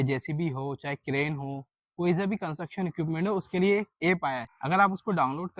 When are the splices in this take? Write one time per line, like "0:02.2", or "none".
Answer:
0:04.5